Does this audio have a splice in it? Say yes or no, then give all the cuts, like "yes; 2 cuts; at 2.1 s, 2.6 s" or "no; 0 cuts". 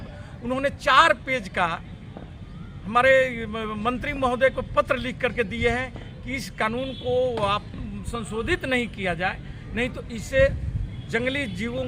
no; 0 cuts